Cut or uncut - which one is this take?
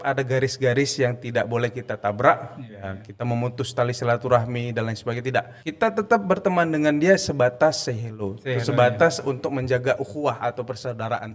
cut